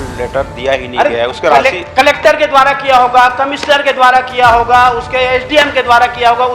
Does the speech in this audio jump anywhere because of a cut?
no; 0 cuts

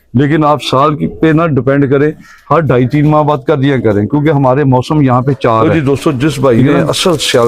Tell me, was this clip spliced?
yes; 1 cut; at 5.6 s

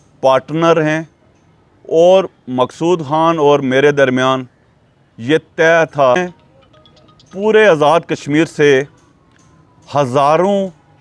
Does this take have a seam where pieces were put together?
yes; 1 cut; at 6.2 s

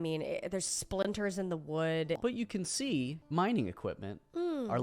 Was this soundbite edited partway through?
yes; 2 cuts; at 2.2 s, 3.2 s

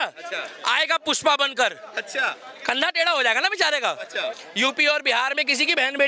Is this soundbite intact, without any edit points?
no; 1 cut; at 4.4 s

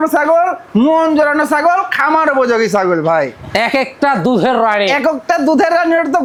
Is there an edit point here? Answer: no; 0 cuts

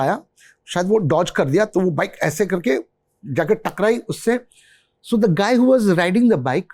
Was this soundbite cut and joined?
no; 0 cuts

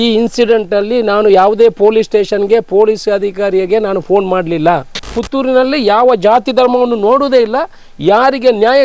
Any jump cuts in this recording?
yes; 1 cut; at 5.2 s

